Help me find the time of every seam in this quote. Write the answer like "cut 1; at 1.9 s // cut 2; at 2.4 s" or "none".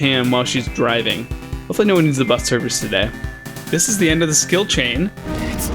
cut 1; at 3.6 s